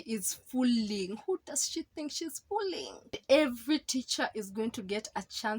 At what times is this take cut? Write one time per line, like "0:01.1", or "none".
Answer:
0:03.2

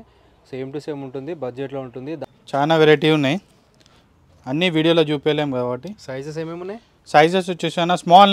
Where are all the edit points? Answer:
0:02.2

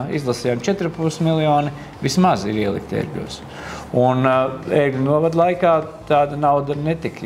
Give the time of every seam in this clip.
none

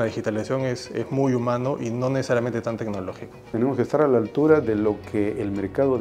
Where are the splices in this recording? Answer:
0:03.4

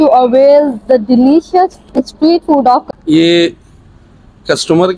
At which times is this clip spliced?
0:02.9

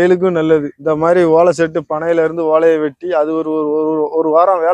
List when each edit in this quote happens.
none

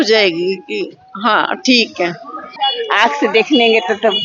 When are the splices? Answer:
0:02.5

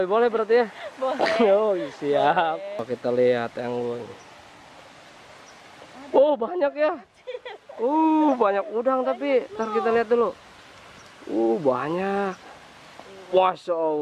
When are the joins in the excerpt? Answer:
0:02.8

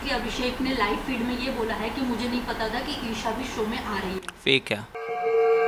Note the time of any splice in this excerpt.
none

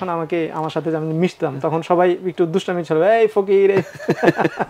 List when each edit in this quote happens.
none

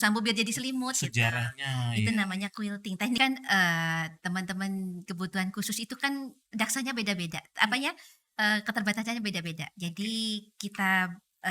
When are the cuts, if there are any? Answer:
0:03.2

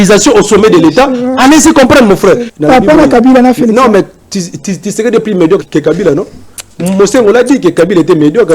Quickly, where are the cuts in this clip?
0:02.5
0:05.7

